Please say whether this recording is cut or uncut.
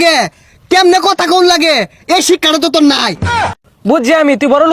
cut